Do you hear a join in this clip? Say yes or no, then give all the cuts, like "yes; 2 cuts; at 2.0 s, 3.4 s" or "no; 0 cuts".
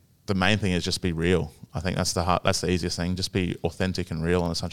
no; 0 cuts